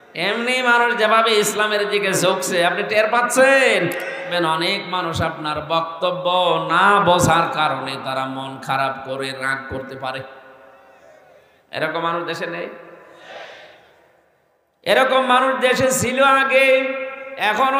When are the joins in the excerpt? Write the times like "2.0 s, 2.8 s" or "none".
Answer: 4.3 s